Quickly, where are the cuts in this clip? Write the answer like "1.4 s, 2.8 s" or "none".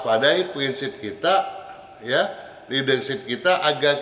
none